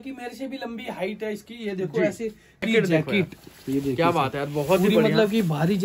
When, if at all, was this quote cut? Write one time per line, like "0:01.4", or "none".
0:02.6